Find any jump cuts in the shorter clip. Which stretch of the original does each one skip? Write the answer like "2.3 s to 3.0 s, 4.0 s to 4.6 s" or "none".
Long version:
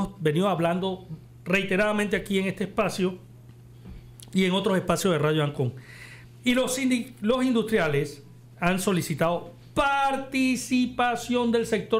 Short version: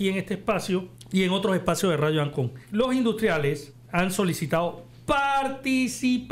3.3 s to 4.2 s, 5.8 s to 7.1 s, 8.2 s to 8.4 s